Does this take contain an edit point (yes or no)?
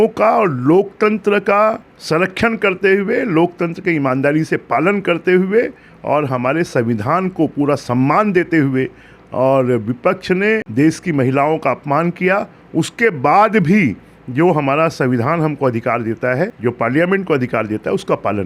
yes